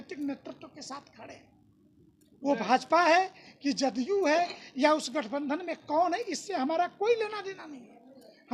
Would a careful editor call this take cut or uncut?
uncut